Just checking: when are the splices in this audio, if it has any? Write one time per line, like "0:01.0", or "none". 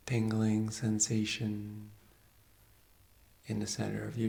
none